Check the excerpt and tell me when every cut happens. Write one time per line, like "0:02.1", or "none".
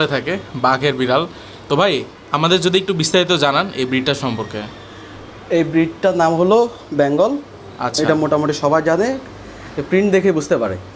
none